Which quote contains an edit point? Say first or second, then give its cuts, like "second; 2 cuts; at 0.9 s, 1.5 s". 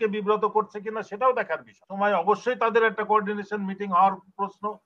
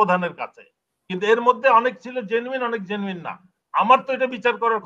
first; 1 cut; at 1.9 s